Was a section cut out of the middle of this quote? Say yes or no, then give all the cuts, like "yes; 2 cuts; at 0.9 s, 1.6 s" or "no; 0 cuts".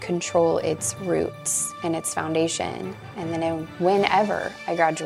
no; 0 cuts